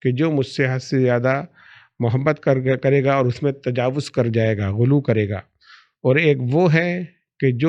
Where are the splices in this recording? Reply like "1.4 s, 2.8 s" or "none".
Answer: none